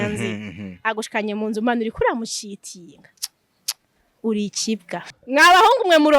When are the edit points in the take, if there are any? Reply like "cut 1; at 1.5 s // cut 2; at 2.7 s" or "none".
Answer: cut 1; at 5.2 s